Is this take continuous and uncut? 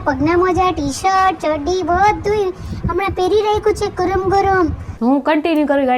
no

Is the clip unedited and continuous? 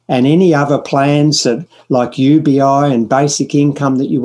yes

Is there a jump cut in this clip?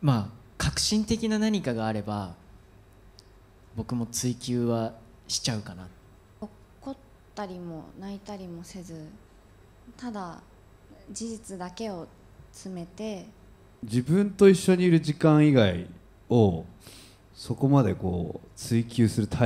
yes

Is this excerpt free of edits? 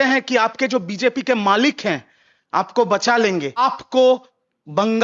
no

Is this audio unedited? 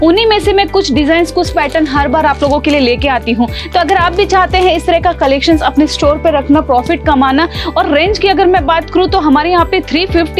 yes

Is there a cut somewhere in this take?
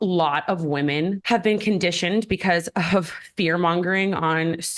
yes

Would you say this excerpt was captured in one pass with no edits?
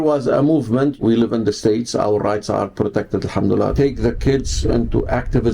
no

